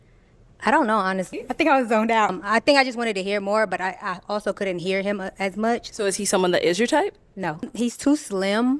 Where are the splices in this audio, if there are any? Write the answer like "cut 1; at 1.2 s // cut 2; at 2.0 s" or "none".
cut 1; at 1.3 s // cut 2; at 2.4 s // cut 3; at 5.9 s // cut 4; at 7.7 s